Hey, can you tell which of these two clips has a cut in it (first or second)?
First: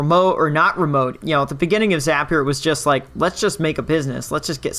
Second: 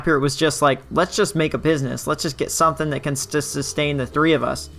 first